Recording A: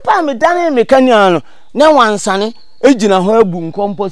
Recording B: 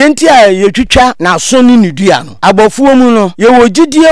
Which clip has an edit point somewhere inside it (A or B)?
B